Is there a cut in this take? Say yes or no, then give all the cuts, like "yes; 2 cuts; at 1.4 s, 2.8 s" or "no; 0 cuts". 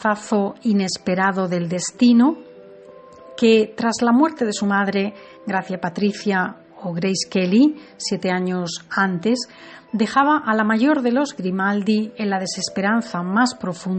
yes; 1 cut; at 3.0 s